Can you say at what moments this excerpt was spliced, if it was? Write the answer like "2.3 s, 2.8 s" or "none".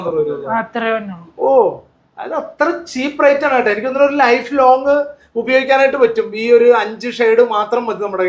none